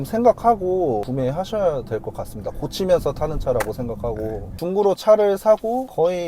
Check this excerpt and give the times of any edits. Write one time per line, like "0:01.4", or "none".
0:01.1
0:04.6